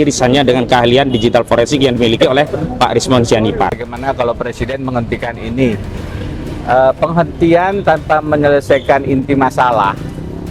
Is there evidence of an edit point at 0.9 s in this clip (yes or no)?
no